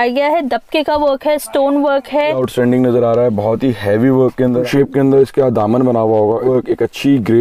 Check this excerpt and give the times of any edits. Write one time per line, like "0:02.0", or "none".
0:02.4
0:04.6
0:06.4